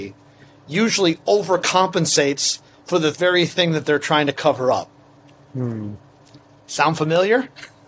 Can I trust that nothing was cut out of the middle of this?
yes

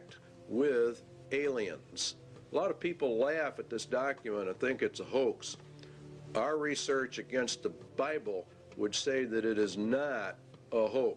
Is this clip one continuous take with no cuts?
no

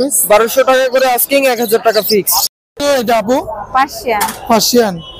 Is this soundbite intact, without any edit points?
no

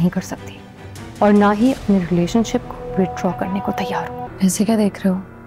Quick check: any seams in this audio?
yes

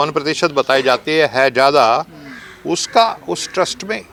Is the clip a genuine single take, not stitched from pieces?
yes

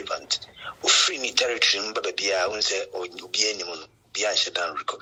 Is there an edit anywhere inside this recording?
no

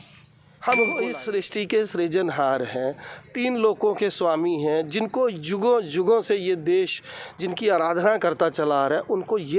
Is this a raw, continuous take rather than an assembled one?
no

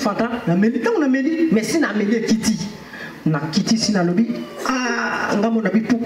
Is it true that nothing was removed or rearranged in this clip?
yes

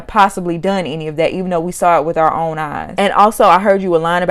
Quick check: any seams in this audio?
yes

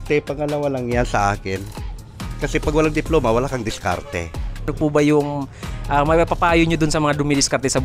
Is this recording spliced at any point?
no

